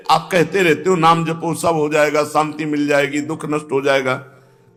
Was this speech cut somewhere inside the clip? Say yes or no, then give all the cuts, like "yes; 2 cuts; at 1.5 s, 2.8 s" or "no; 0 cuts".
no; 0 cuts